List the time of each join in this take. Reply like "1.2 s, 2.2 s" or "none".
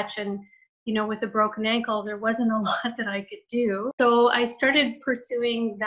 3.9 s